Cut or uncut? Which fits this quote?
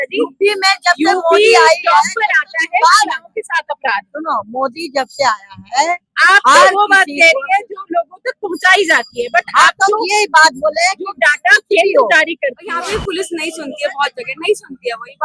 cut